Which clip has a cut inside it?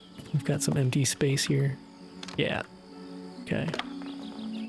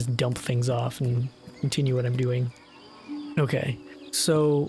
second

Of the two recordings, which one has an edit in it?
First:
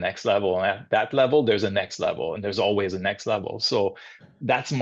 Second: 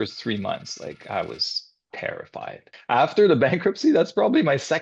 second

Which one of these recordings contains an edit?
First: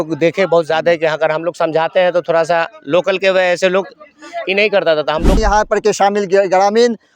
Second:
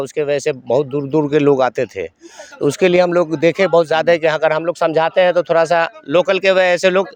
first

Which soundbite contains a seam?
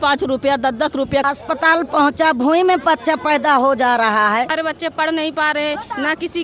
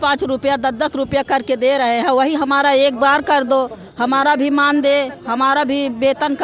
first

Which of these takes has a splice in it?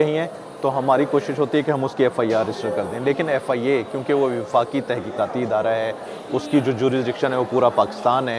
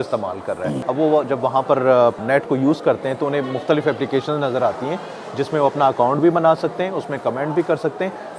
second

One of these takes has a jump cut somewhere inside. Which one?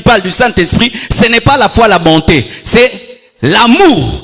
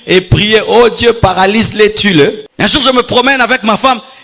second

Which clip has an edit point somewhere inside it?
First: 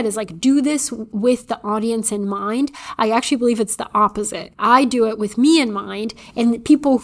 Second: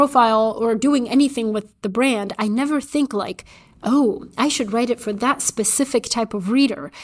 first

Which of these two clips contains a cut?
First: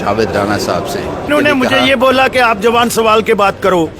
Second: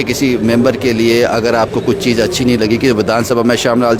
first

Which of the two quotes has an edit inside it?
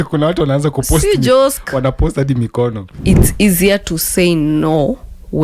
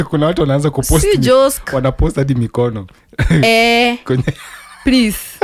first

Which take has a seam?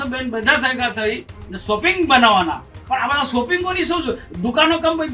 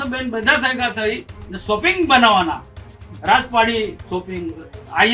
first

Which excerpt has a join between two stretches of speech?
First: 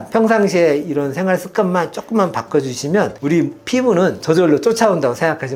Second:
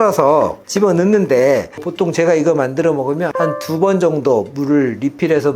second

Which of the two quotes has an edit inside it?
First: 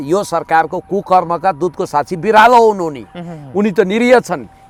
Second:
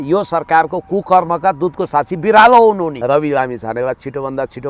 second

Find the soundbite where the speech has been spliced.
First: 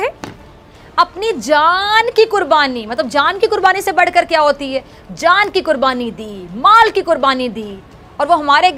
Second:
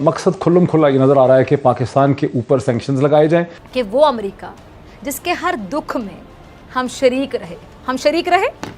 second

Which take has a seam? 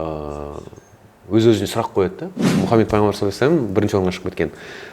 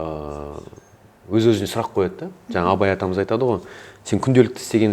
first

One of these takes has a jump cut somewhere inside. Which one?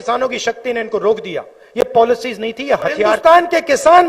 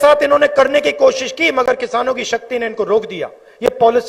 first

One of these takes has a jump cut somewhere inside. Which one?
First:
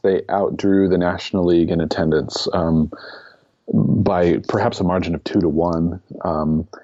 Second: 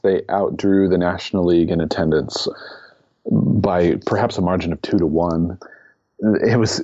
second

